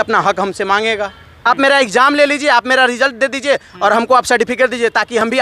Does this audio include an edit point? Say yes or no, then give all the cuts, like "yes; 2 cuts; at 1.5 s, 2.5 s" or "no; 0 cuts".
yes; 1 cut; at 1.3 s